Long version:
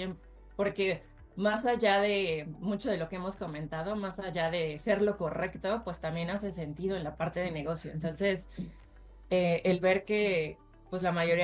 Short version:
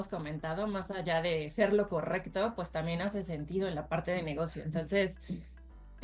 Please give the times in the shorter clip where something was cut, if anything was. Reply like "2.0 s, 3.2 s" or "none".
none